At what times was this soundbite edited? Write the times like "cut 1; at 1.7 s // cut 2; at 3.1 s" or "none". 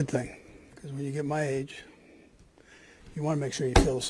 none